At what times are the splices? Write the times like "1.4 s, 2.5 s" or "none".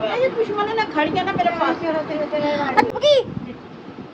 2.9 s